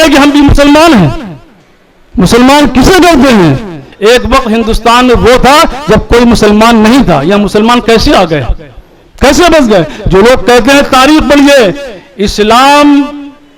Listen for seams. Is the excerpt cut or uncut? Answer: cut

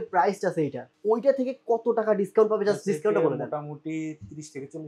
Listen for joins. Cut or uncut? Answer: uncut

